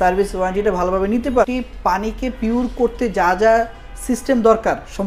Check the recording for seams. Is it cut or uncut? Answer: cut